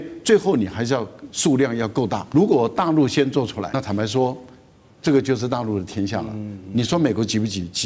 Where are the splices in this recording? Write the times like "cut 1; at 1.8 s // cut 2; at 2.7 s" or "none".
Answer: cut 1; at 2.2 s // cut 2; at 3.7 s

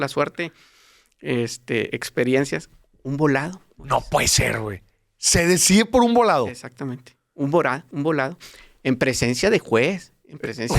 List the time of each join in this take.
none

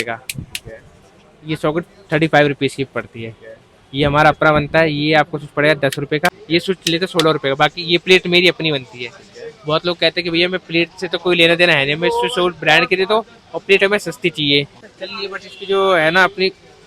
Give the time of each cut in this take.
cut 1; at 6.4 s // cut 2; at 14.8 s

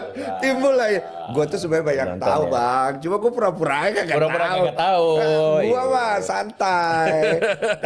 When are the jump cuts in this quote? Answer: none

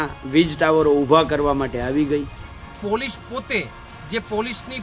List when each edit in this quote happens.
cut 1; at 2.8 s

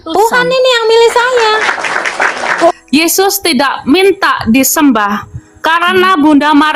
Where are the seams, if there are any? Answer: cut 1; at 2.7 s

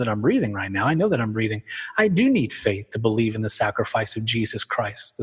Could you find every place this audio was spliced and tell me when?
none

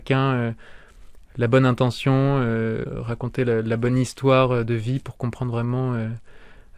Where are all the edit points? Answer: cut 1; at 2.9 s

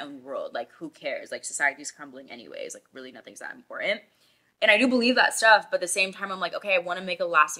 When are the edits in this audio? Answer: none

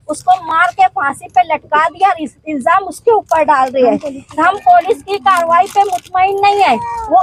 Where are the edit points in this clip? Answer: none

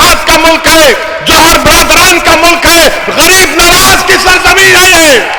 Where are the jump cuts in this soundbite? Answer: none

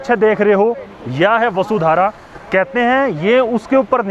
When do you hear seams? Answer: none

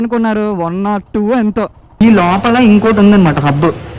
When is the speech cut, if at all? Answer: cut 1; at 1.9 s

